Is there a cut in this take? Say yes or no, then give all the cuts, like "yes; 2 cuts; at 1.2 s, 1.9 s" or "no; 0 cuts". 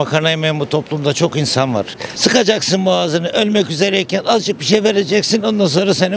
yes; 1 cut; at 2.0 s